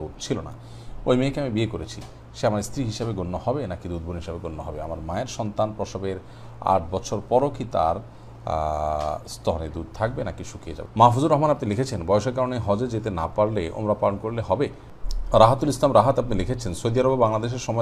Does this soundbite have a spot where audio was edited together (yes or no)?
yes